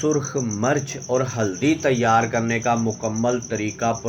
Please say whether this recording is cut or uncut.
uncut